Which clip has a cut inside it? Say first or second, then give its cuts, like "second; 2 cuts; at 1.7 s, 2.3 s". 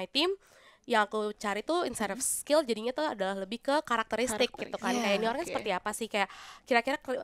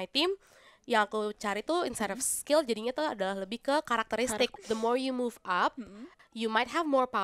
second; 2 cuts; at 4.6 s, 6.1 s